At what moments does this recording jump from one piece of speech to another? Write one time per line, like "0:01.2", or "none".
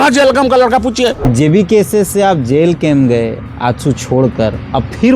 0:01.2